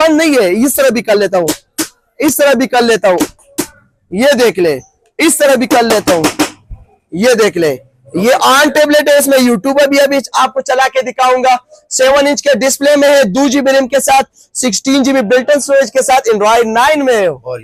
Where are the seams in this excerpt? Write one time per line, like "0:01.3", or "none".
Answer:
none